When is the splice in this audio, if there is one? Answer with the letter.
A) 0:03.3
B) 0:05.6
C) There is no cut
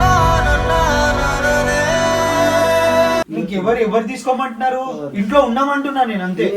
A